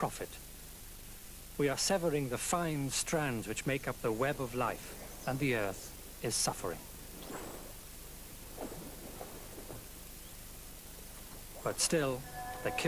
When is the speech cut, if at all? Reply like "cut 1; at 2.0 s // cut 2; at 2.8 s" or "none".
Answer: none